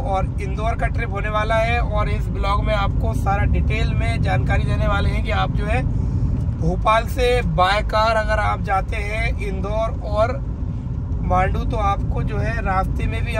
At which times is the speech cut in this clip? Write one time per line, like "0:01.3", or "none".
none